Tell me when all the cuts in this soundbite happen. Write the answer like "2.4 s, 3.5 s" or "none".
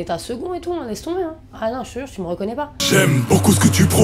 2.7 s